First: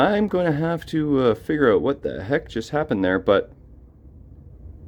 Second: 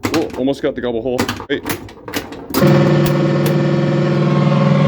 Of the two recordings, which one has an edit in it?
second; 1 cut; at 1.4 s

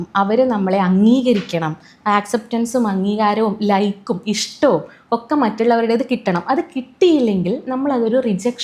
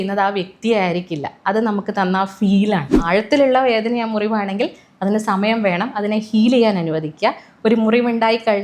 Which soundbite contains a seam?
second; 1 cut; at 2.9 s

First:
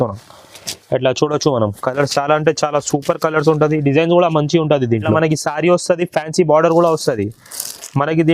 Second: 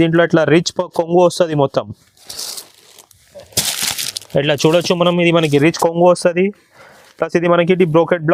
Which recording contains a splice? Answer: first; 1 cut; at 5.1 s

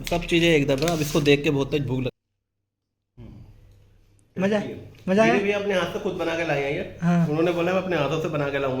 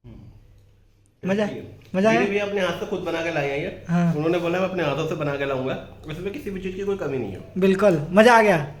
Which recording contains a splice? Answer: first; 1 cut; at 2.2 s

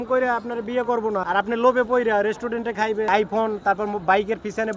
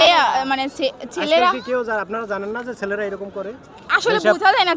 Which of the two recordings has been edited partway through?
first; 2 cuts; at 1.2 s, 3.1 s

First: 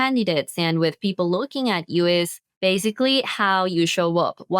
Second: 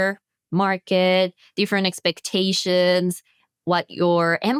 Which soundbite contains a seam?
first; 1 cut; at 2.4 s

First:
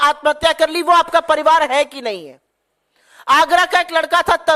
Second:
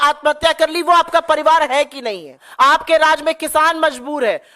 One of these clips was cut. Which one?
second; 1 cut; at 2.5 s

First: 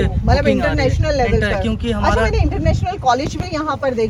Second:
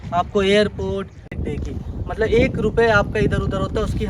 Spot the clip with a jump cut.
second; 1 cut; at 1.2 s

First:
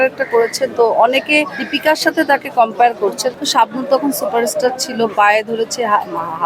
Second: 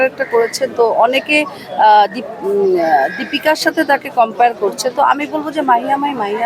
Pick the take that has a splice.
first; 2 cuts; at 1.6 s, 3.3 s

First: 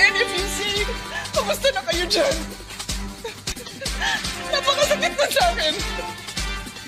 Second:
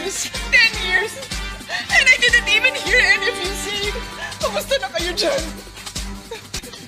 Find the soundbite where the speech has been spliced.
first; 1 cut; at 4.9 s

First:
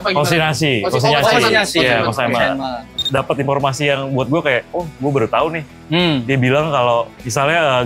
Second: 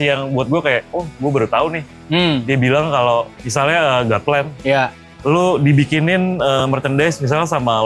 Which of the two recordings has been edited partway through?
first; 1 cut; at 2.9 s

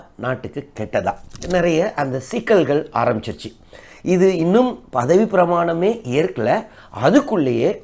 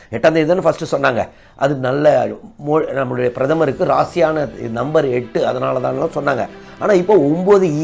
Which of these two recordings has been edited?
first; 1 cut; at 1.3 s

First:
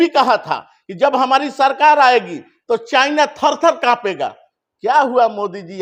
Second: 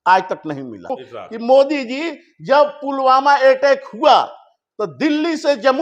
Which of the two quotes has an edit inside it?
second; 1 cut; at 1.0 s

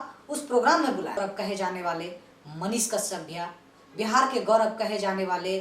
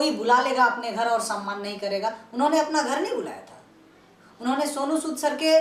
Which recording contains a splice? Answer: first; 1 cut; at 1.2 s

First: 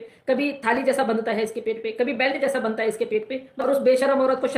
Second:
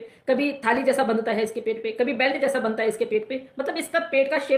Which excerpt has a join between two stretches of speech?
first; 1 cut; at 3.5 s

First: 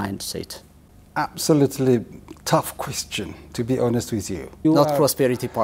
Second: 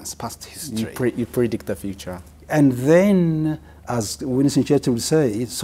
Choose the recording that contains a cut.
first; 1 cut; at 4.6 s

